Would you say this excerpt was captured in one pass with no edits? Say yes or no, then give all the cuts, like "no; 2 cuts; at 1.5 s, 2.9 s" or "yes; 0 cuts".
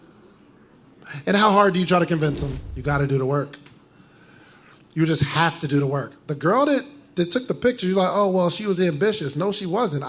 no; 1 cut; at 2.7 s